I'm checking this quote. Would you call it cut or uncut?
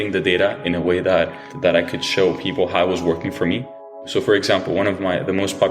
cut